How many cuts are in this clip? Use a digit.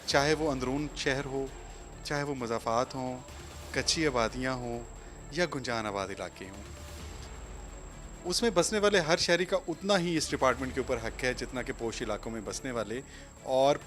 0